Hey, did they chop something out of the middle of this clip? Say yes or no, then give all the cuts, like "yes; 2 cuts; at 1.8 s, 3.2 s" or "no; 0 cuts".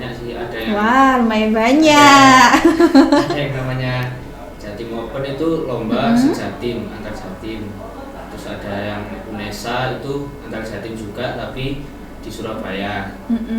no; 0 cuts